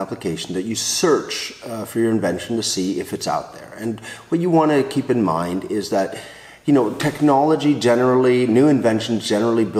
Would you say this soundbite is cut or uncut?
uncut